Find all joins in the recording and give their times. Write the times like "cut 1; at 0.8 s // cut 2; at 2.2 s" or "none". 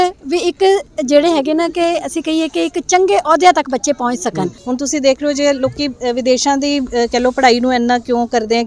cut 1; at 4.6 s